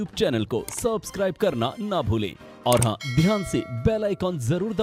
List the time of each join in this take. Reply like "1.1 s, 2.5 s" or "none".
none

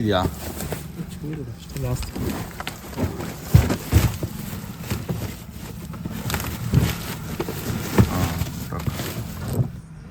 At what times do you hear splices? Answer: none

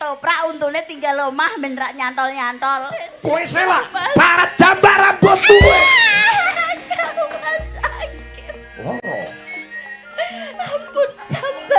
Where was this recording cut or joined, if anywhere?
3.1 s

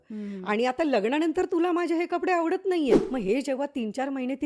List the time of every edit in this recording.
3.1 s

